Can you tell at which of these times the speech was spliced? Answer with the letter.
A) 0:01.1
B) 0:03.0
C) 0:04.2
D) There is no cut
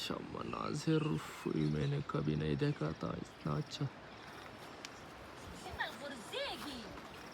D